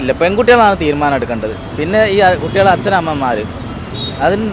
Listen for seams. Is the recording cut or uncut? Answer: uncut